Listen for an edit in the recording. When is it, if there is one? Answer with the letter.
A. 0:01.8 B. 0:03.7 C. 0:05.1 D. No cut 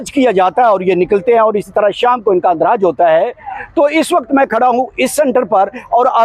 D